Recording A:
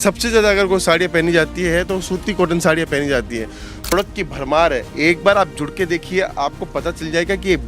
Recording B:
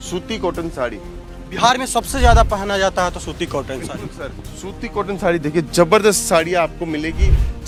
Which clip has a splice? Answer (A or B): A